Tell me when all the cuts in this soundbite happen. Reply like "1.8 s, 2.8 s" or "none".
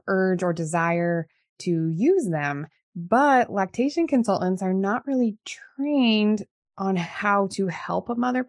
none

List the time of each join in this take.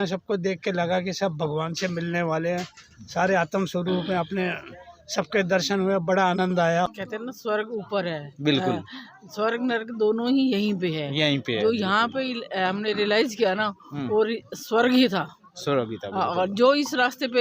6.9 s

